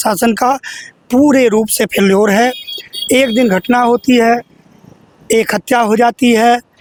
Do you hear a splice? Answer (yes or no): no